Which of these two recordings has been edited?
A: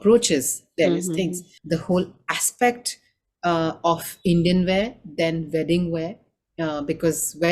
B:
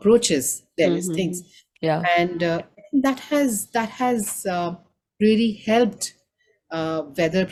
A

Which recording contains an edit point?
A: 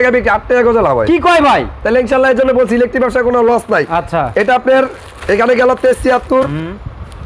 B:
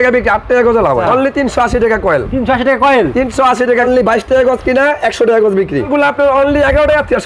B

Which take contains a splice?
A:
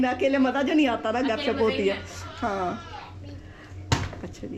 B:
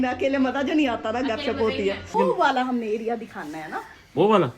B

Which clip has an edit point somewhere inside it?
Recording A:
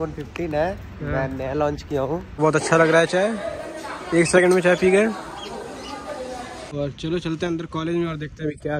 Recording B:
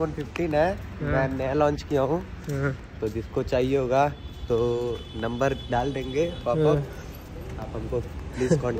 A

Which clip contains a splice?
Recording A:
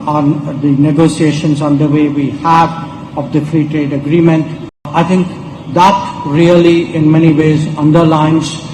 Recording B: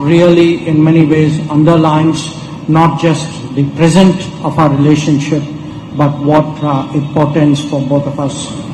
A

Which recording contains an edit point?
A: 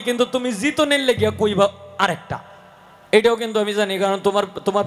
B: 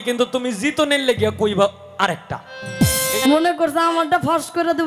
B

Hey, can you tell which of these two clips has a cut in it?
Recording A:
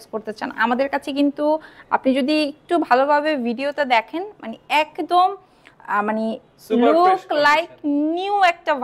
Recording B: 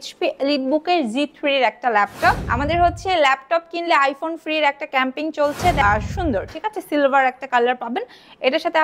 B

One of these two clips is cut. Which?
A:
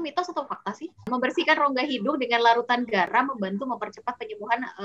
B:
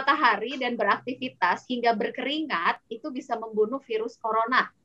A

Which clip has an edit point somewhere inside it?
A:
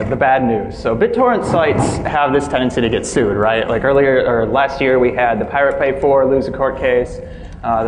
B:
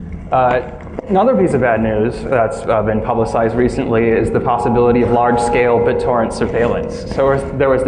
B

